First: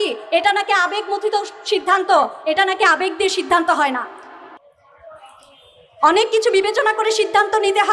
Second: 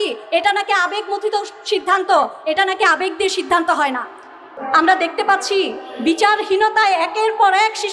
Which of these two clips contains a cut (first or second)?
second